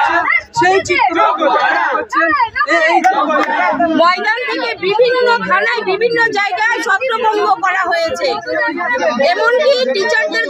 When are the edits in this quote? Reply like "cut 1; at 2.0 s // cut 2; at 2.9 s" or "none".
cut 1; at 3.7 s